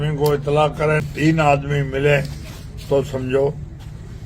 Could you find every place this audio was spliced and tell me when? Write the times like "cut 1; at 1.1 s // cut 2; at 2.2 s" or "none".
cut 1; at 1.1 s

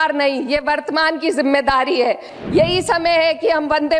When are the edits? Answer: cut 1; at 2.3 s

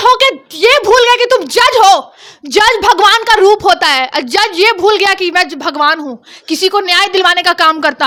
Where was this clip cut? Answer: none

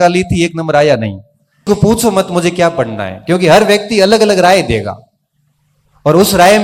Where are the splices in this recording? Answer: cut 1; at 1.7 s

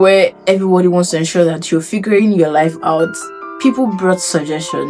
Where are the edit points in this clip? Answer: none

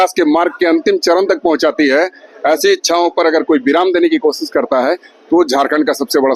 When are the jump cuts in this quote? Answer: none

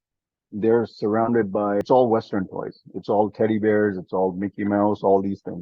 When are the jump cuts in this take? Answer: cut 1; at 1.8 s

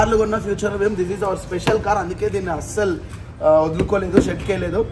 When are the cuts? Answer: none

